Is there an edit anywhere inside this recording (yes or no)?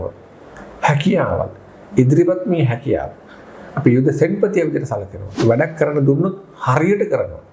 yes